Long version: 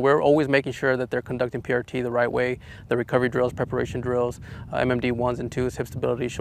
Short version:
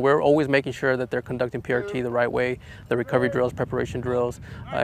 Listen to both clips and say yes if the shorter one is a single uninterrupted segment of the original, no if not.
yes